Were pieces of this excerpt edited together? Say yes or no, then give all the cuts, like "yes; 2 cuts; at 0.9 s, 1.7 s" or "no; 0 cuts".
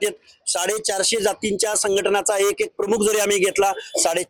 no; 0 cuts